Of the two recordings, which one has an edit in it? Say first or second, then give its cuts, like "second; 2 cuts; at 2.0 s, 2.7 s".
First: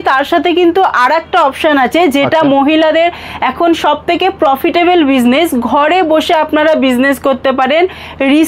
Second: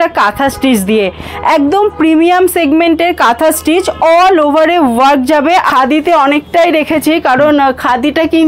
second; 1 cut; at 5.7 s